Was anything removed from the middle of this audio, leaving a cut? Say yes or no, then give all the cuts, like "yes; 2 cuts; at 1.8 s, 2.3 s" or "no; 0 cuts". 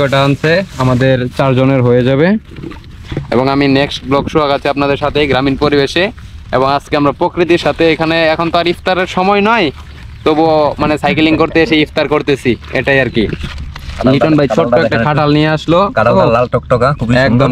no; 0 cuts